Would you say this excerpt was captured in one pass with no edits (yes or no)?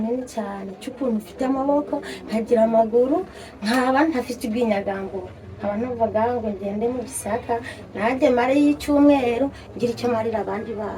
yes